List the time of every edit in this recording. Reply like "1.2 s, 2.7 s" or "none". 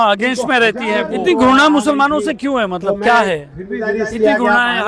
1.1 s, 3.9 s